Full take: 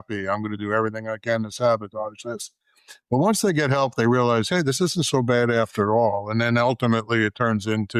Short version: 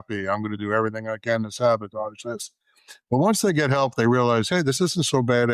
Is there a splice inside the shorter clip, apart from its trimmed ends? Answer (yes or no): no